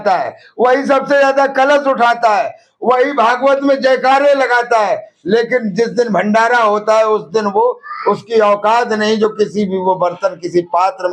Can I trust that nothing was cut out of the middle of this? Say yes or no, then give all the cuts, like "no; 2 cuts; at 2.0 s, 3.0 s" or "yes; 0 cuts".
yes; 0 cuts